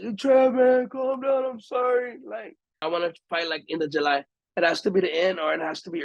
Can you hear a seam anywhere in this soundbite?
yes; 2 cuts; at 2.8 s, 4.4 s

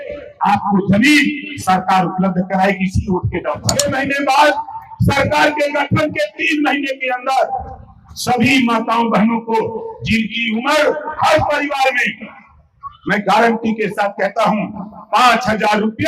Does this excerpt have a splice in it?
yes; 1 cut; at 3.7 s

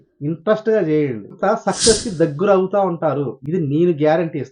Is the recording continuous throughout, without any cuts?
no; 1 cut; at 1.3 s

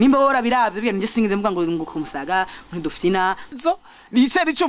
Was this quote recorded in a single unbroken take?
no; 1 cut; at 3.6 s

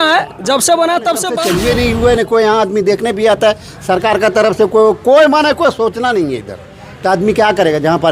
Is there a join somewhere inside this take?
yes; 1 cut; at 1.4 s

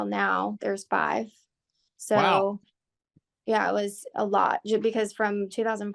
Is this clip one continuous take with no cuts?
yes; 0 cuts

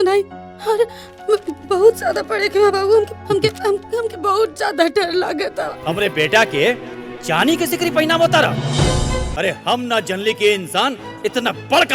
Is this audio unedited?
no; 2 cuts; at 5.8 s, 9.3 s

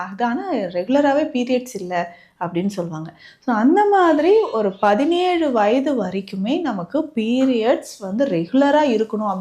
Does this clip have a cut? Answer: no; 0 cuts

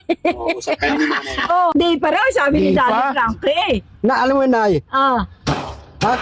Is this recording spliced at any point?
yes; 1 cut; at 1.8 s

